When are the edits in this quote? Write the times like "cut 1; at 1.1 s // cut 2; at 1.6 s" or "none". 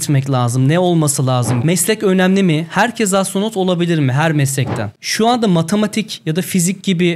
cut 1; at 1.5 s // cut 2; at 5.0 s